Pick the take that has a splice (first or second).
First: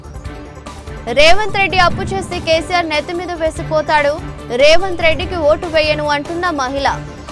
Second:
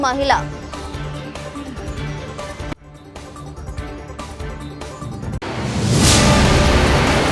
first